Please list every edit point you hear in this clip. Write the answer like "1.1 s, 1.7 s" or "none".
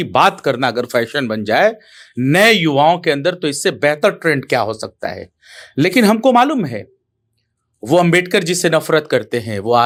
none